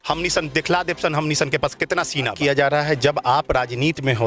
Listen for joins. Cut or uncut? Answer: cut